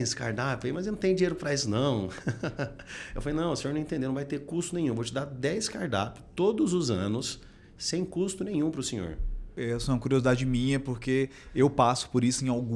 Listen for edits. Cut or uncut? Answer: cut